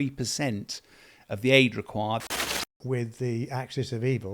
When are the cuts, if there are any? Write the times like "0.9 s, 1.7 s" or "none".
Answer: 2.2 s